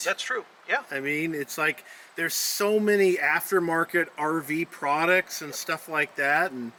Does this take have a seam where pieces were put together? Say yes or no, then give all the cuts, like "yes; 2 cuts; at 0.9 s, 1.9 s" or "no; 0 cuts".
no; 0 cuts